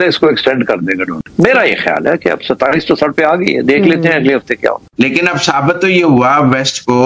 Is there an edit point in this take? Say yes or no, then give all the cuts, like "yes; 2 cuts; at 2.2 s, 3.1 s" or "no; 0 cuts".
yes; 2 cuts; at 1.1 s, 4.8 s